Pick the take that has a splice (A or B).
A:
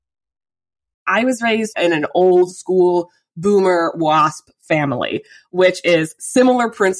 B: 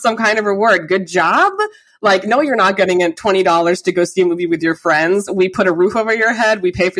A